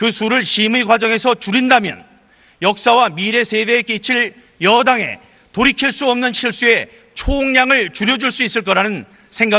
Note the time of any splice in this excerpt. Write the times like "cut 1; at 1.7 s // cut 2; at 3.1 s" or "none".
none